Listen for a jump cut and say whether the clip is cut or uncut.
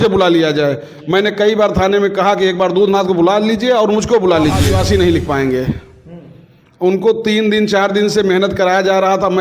cut